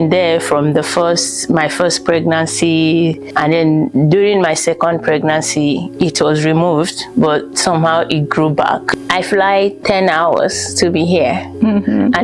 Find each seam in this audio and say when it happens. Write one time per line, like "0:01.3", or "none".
0:08.8